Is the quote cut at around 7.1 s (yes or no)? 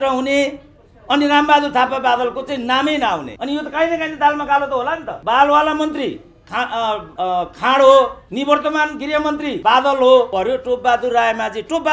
yes